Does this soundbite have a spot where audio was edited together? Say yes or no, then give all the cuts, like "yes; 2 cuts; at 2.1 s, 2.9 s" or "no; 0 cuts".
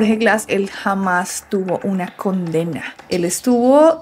no; 0 cuts